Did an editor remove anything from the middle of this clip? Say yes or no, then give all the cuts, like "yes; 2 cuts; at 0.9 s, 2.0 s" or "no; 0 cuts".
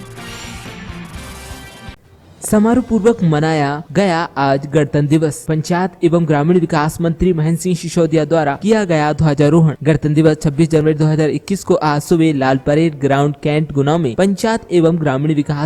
yes; 1 cut; at 2.0 s